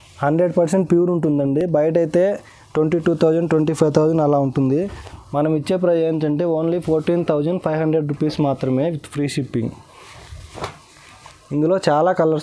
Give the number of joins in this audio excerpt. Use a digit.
0